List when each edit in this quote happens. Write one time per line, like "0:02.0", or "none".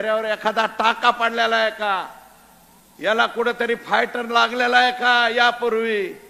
none